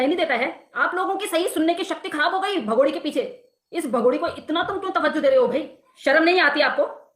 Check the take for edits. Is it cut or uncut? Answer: cut